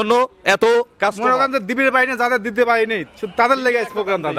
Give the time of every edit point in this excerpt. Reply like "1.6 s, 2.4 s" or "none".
none

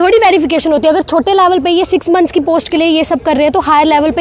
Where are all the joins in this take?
none

